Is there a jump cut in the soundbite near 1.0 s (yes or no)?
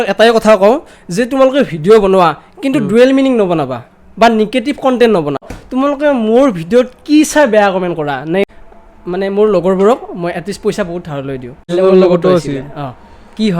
no